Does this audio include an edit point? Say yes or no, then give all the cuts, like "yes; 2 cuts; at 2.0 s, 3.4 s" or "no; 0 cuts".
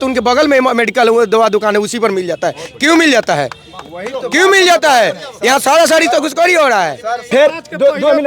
yes; 1 cut; at 7.3 s